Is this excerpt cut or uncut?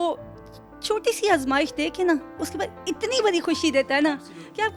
uncut